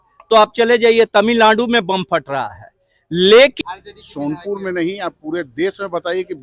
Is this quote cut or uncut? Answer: cut